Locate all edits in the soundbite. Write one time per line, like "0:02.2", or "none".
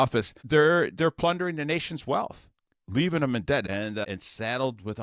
0:03.7